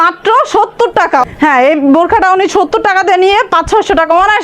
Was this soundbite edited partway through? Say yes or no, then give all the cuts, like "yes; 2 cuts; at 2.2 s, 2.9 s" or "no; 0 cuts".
yes; 1 cut; at 1.2 s